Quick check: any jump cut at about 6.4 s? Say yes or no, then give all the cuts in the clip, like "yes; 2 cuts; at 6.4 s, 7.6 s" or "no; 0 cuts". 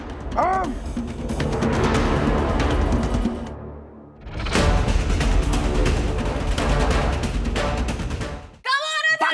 yes; 2 cuts; at 6.4 s, 8.2 s